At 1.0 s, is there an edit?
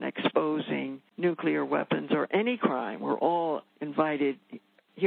yes; 2 cuts; at 1.0 s, 3.8 s

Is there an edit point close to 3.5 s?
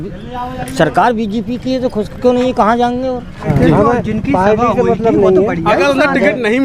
yes; 1 cut; at 3.5 s

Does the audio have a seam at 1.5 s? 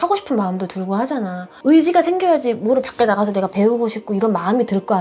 yes; 1 cut; at 1.5 s

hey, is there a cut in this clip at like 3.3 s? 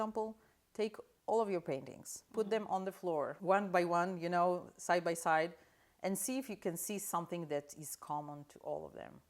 yes; 1 cut; at 3.3 s

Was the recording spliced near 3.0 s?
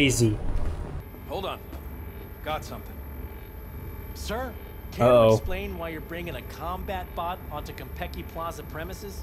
no; 1 cut; at 1.0 s

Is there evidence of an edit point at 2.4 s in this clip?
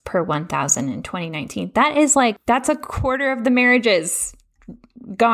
yes; 1 cut; at 2.4 s

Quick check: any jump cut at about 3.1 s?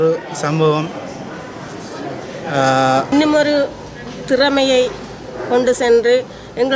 yes; 1 cut; at 3.1 s

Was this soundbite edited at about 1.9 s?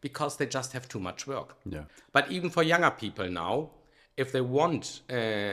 yes; 1 cut; at 1.9 s

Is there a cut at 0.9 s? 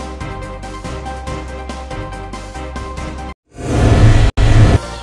yes; 2 cuts; at 0.9 s, 2.5 s

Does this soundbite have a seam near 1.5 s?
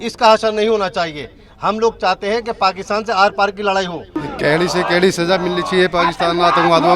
no; 1 cut; at 4.2 s

